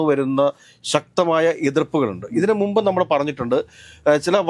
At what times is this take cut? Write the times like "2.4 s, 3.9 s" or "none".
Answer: none